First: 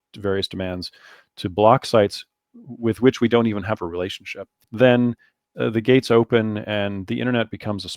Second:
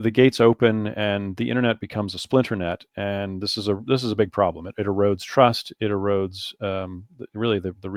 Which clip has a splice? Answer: first; 1 cut; at 4.6 s

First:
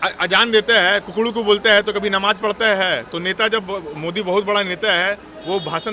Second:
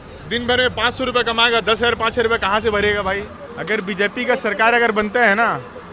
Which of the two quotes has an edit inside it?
second; 1 cut; at 3.3 s

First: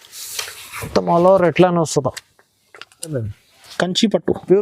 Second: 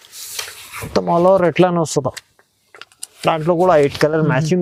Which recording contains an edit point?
first; 1 cut; at 3.2 s

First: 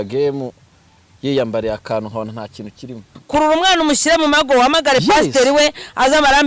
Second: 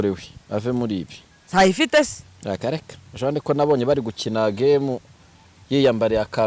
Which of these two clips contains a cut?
first; 1 cut; at 3.2 s

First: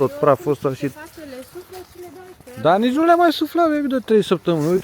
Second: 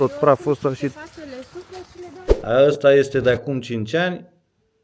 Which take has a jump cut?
second; 1 cut; at 2.2 s

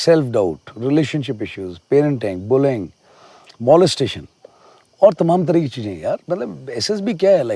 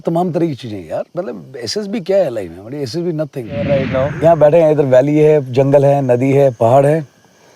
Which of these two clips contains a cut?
second; 1 cut; at 3.7 s

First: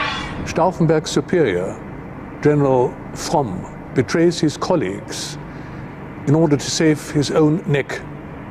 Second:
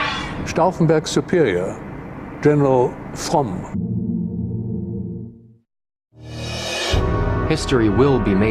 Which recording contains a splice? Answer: first; 1 cut; at 3.7 s

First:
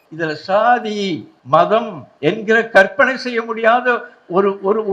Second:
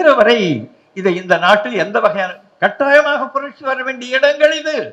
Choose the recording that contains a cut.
first; 2 cuts; at 1.3 s, 2.0 s

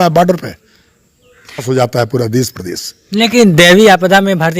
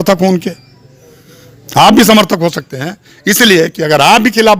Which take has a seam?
first; 1 cut; at 1.6 s

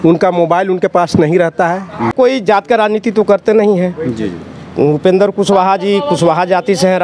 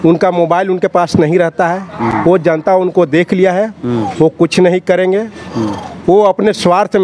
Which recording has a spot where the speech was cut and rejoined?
first; 1 cut; at 2.1 s

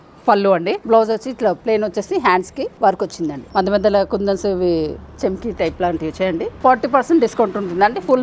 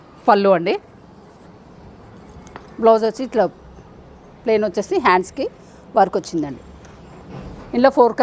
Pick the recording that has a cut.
first; 5 cuts; at 0.8 s, 1.6 s, 2.7 s, 3.4 s, 6.5 s

